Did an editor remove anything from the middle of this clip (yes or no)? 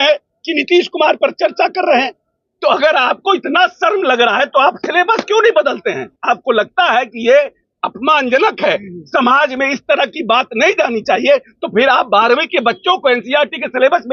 yes